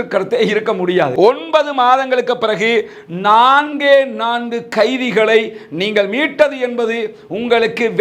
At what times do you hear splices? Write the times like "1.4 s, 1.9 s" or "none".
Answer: 1.1 s